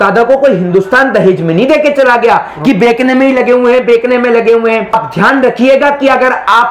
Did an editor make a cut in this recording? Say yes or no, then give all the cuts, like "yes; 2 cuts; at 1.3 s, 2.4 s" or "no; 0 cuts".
yes; 1 cut; at 4.9 s